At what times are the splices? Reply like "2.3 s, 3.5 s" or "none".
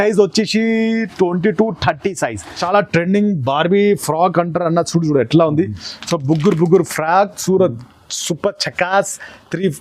2.6 s